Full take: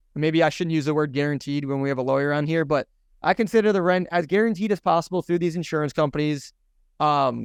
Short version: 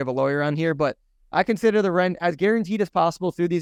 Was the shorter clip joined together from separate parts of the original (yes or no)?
no